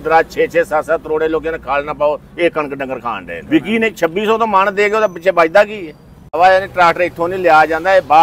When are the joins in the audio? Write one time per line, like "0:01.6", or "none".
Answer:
0:03.3
0:06.4

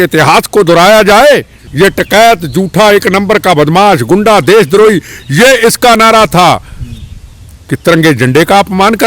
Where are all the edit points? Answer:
0:01.6

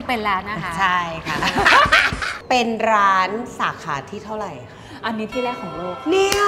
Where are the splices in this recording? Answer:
0:02.2

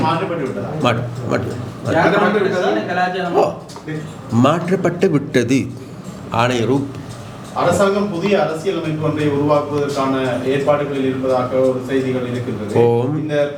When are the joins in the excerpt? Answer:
none

